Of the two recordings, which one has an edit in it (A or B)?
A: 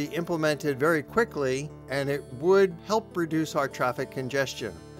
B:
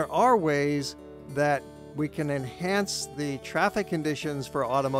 A